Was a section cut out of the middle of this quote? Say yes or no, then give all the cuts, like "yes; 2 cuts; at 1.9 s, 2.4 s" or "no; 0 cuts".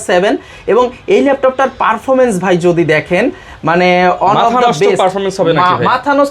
no; 0 cuts